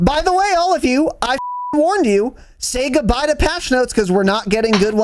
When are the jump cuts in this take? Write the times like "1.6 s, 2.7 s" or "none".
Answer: none